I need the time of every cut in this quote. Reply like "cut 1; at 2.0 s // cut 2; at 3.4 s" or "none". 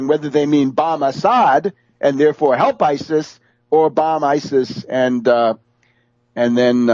cut 1; at 1.3 s